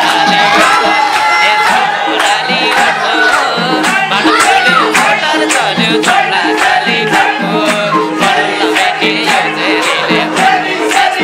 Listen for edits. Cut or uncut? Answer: uncut